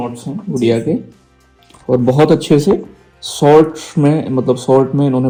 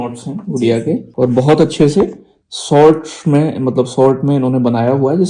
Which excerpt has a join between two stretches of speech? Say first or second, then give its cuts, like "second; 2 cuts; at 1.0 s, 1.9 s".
second; 1 cut; at 1.1 s